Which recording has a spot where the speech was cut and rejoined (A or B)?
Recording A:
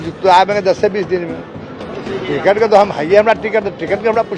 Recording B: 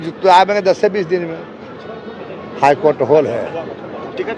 A